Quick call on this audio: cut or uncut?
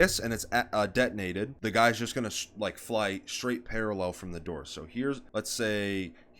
cut